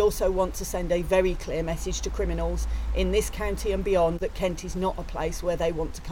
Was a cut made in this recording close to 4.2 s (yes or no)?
yes